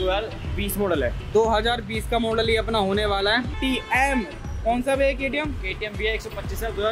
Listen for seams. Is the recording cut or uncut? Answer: cut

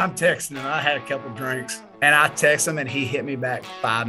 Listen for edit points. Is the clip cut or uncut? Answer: cut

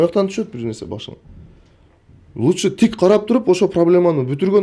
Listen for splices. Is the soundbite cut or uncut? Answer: uncut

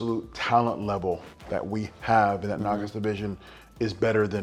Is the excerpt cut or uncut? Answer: uncut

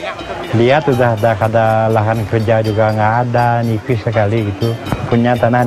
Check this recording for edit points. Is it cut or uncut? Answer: uncut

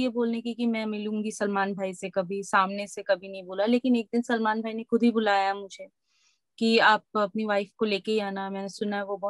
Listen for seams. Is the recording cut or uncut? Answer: uncut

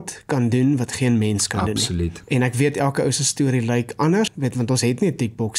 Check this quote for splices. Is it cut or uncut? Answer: cut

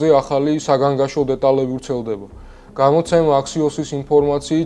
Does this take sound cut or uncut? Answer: uncut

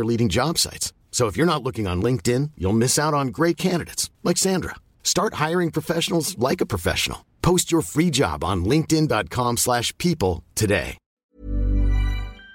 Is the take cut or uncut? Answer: cut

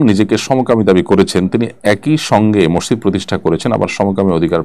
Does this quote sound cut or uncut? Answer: uncut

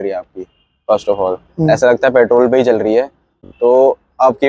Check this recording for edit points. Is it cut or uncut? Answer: cut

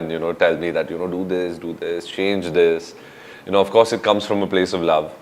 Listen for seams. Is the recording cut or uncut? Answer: uncut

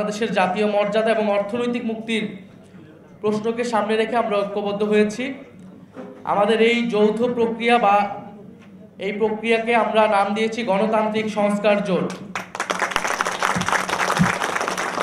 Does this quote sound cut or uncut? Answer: uncut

